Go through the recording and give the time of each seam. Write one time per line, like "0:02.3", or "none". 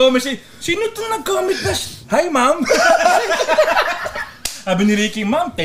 0:01.9